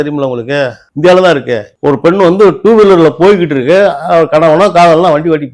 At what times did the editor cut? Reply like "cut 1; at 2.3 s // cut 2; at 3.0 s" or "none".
cut 1; at 1.8 s